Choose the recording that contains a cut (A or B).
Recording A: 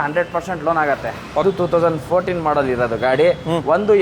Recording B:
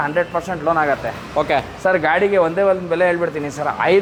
A